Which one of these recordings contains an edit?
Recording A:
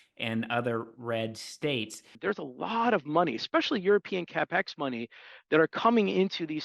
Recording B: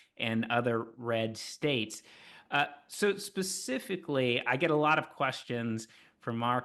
A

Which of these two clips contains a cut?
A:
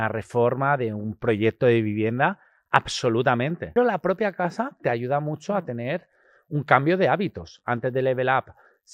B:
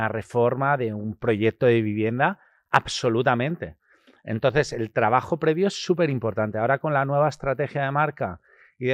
A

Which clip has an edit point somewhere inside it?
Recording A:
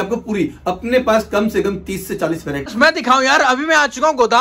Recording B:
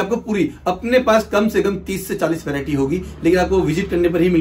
A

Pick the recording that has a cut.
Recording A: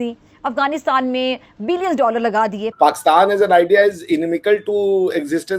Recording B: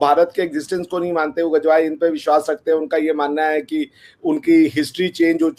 A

